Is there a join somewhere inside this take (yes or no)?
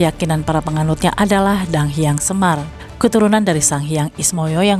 no